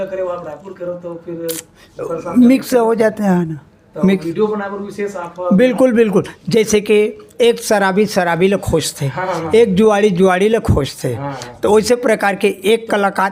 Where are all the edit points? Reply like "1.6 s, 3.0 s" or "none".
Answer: none